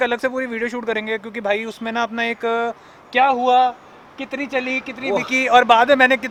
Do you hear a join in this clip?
no; 0 cuts

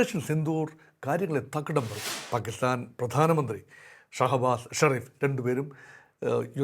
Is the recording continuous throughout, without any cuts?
no; 1 cut; at 2.0 s

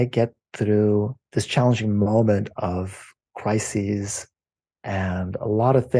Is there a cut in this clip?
yes; 1 cut; at 1.2 s

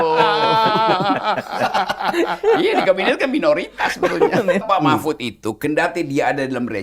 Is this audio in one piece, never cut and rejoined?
no; 1 cut; at 4.6 s

